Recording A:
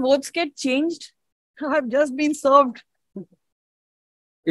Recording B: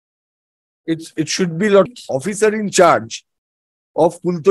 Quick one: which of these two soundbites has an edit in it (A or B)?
B